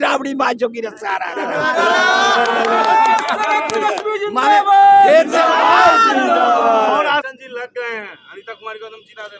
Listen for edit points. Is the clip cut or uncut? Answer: cut